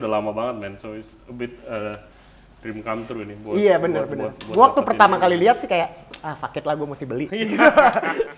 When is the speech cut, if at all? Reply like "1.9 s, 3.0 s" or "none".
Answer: none